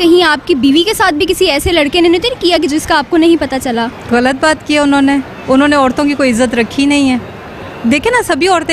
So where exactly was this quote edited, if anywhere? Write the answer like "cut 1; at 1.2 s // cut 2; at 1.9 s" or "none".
cut 1; at 4.0 s